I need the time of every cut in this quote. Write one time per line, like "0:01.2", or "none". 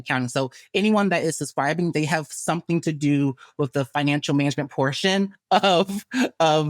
none

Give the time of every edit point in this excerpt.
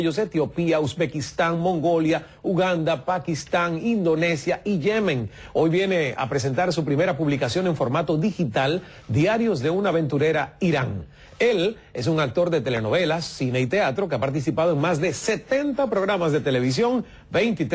none

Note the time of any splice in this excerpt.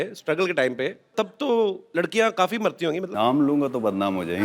0:01.1
0:01.8
0:03.1

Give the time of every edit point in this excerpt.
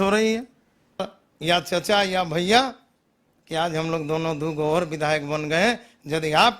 0:01.0

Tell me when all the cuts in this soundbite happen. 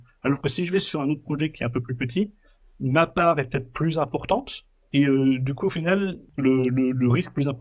0:06.2

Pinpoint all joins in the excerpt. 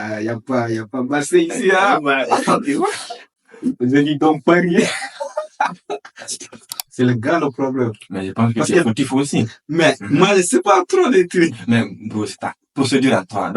0:06.9

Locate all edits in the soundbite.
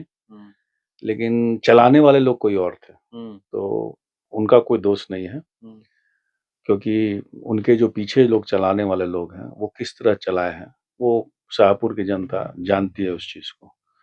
none

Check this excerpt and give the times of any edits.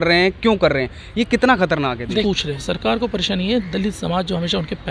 0:02.2

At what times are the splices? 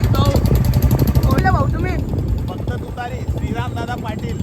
0:01.4

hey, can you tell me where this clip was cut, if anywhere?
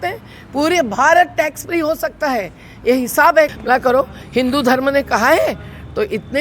0:03.5

